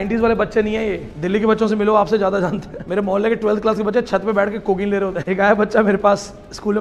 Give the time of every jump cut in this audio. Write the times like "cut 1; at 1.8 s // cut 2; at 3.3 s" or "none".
cut 1; at 1.1 s // cut 2; at 2.7 s // cut 3; at 5.2 s